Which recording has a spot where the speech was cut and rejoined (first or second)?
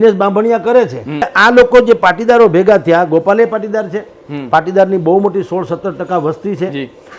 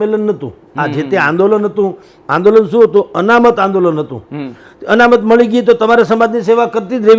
first